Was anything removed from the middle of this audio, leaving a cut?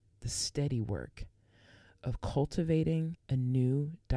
yes; 1 cut; at 3.2 s

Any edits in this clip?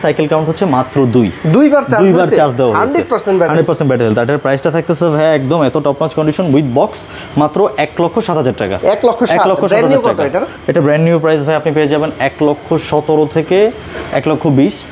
no; 0 cuts

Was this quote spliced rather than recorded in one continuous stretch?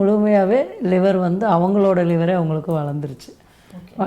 no; 0 cuts

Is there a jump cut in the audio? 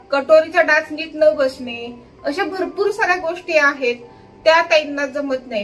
no; 0 cuts

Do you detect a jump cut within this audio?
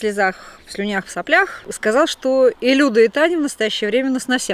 yes; 1 cut; at 1.6 s

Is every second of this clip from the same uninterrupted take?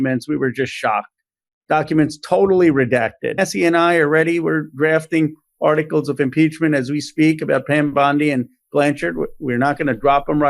no; 1 cut; at 3.4 s

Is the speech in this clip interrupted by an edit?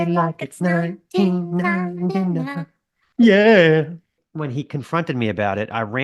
yes; 1 cut; at 4.2 s

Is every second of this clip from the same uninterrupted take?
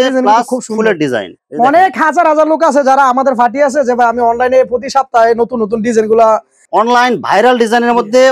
no; 2 cuts; at 1.4 s, 6.6 s

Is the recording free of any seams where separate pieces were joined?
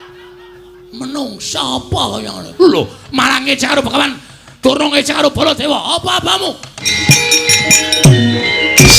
no; 1 cut; at 7.0 s

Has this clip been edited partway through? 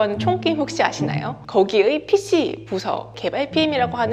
no; 0 cuts

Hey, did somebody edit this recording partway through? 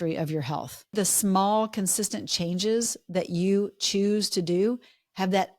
yes; 1 cut; at 0.9 s

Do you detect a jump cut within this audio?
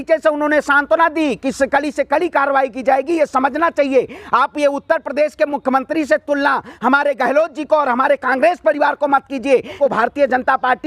yes; 1 cut; at 9.8 s

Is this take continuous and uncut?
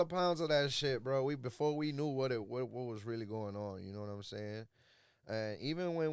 yes; 0 cuts

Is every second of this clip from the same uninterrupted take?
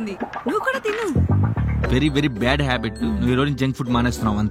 no; 1 cut; at 1.9 s

